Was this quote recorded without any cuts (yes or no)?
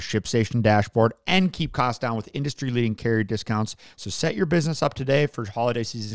no